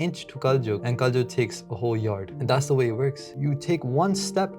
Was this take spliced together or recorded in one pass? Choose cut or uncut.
cut